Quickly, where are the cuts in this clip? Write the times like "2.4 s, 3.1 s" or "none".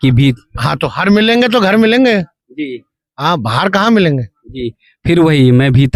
none

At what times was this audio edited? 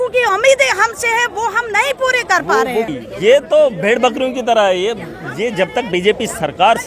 3.0 s

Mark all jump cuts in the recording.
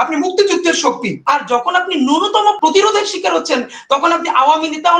1.1 s, 2.6 s

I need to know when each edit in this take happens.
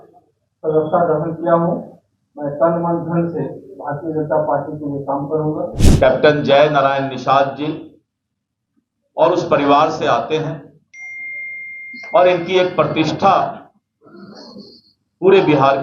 5.8 s

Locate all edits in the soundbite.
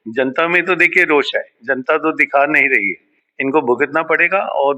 none

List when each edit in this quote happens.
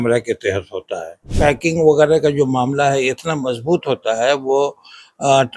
1.2 s

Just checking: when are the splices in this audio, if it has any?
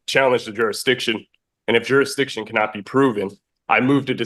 none

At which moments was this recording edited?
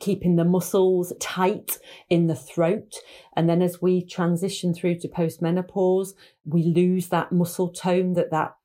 none

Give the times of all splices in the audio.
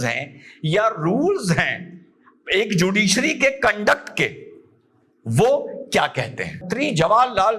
6.6 s

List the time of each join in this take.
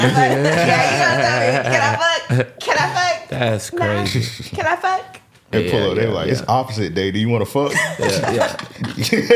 5.5 s

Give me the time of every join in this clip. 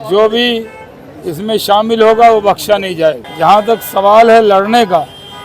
3.3 s

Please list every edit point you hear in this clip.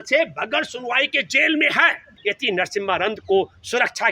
2.1 s

